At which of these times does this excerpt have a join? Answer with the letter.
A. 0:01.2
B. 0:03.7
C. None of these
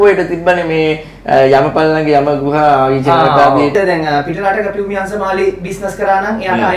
B